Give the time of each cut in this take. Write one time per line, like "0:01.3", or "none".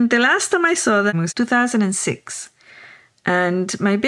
0:01.1